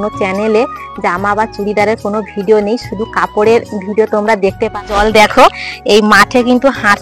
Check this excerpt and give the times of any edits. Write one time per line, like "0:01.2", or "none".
0:04.8